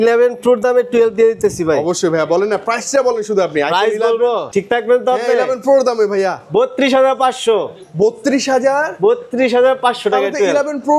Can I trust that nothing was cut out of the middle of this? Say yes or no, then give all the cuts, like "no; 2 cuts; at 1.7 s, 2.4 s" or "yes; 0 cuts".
no; 1 cut; at 4.5 s